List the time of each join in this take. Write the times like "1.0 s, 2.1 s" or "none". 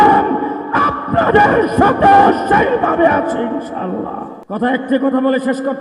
4.3 s